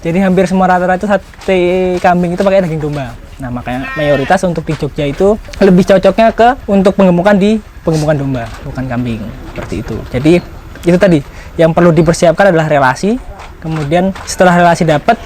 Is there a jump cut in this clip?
yes; 3 cuts; at 5.5 s, 6.6 s, 14.2 s

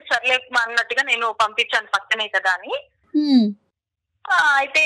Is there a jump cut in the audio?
no; 0 cuts

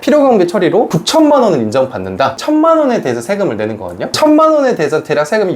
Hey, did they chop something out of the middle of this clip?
yes; 1 cut; at 2.4 s

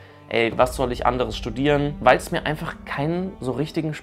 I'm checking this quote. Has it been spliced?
yes; 1 cut; at 1.9 s

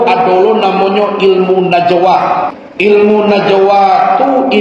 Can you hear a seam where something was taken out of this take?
yes; 1 cut; at 2.6 s

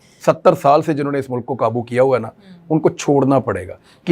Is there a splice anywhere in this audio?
no; 0 cuts

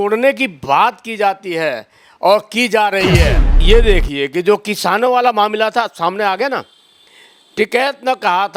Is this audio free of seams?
no; 1 cut; at 3.5 s

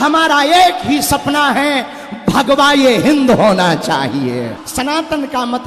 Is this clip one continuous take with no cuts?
no; 1 cut; at 4.6 s

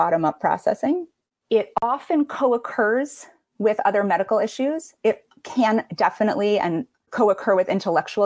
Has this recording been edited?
no; 0 cuts

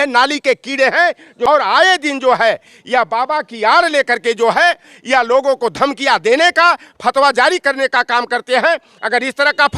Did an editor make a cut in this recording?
yes; 1 cut; at 1.3 s

